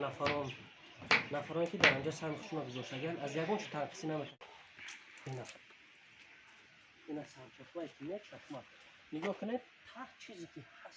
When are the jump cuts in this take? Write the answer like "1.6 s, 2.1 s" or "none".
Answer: 4.4 s